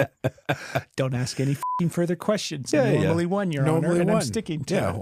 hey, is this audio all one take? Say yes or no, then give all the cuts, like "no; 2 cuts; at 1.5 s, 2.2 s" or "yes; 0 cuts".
yes; 0 cuts